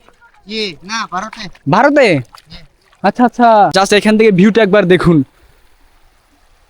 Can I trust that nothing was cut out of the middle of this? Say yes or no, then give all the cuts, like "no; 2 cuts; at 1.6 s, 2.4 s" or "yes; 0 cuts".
no; 1 cut; at 3.7 s